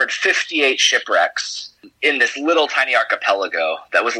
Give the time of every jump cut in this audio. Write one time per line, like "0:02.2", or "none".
none